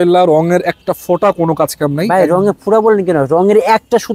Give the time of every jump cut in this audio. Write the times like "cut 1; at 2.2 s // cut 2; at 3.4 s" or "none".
none

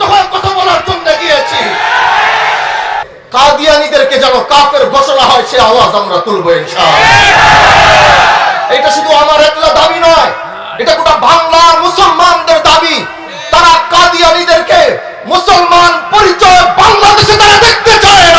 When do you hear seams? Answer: cut 1; at 3.1 s

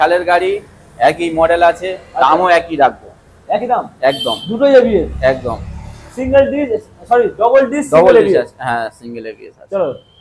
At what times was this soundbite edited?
none

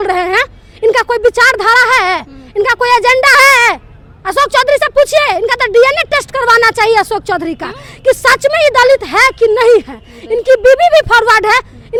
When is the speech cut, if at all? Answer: none

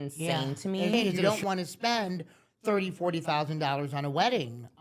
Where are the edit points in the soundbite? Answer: cut 1; at 1.2 s

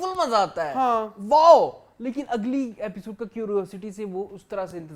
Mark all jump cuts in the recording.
none

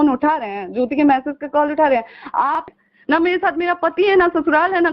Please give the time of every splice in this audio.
cut 1; at 2.7 s

